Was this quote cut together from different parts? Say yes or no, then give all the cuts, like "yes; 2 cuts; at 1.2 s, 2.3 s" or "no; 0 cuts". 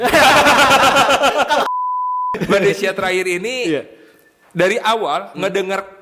yes; 1 cut; at 1.7 s